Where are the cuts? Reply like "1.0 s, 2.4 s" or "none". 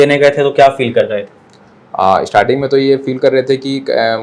none